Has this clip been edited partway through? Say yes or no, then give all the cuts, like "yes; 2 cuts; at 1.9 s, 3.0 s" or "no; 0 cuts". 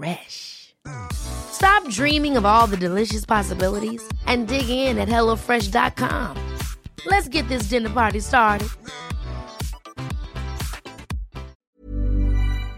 yes; 1 cut; at 11.5 s